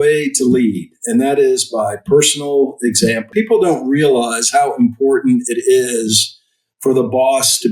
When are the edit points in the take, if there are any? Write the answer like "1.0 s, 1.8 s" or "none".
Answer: 3.3 s